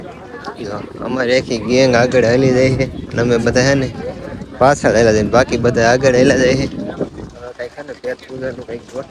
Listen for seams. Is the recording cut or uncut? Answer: uncut